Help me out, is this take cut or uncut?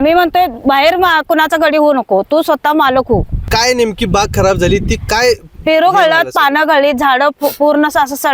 cut